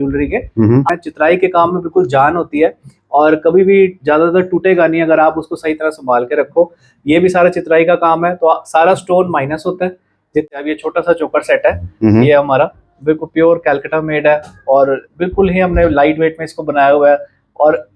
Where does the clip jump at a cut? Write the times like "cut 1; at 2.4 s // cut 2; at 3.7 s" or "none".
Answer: cut 1; at 0.9 s // cut 2; at 10.5 s